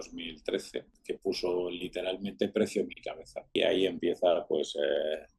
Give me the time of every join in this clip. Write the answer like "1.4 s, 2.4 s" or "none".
0.9 s, 3.5 s